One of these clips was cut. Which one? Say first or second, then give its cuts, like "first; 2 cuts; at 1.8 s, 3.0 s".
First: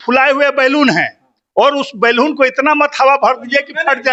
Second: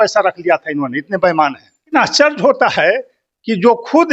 second; 1 cut; at 1.9 s